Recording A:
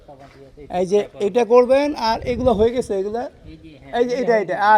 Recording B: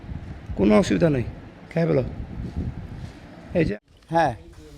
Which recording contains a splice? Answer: B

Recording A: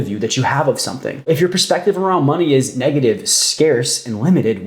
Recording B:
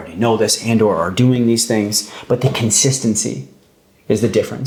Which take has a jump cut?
A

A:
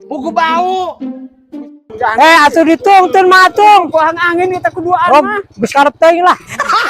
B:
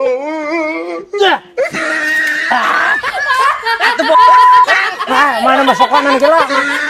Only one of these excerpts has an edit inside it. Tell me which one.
A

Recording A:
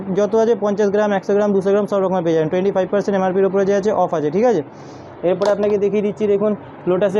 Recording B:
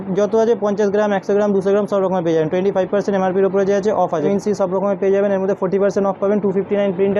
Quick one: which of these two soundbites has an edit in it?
B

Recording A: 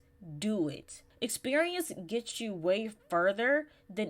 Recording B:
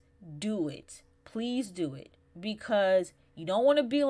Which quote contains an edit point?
A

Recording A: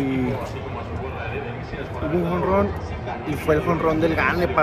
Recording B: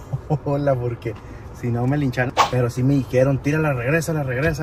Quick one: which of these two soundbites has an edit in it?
B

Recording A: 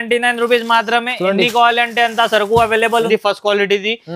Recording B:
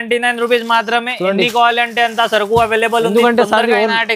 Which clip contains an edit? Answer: A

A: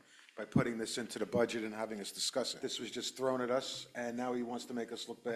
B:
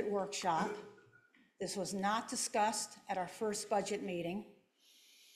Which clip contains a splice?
A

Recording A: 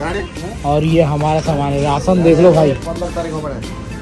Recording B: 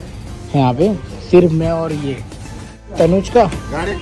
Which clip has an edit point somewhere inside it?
B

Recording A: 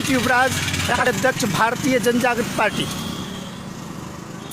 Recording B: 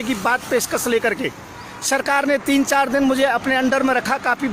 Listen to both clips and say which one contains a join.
A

